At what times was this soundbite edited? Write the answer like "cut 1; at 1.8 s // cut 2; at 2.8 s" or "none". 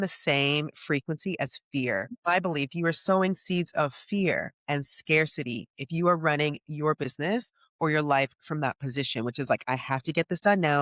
cut 1; at 2.1 s

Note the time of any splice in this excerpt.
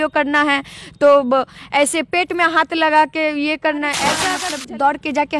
cut 1; at 4.3 s

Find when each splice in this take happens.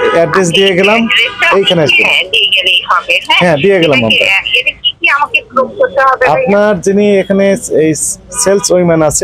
none

